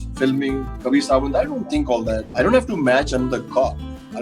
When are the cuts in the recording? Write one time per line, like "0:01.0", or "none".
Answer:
0:02.2